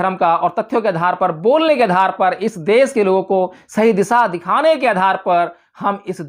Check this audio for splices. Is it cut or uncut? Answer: uncut